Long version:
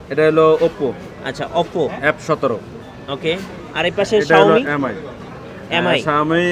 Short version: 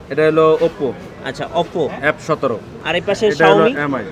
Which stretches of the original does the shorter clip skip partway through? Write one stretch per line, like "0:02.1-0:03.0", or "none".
0:02.7-0:03.6